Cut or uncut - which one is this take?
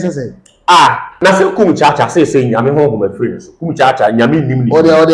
cut